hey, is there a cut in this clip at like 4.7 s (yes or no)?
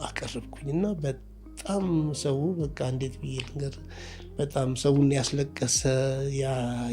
no